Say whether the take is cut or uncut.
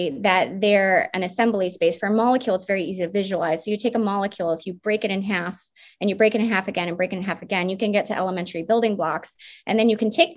uncut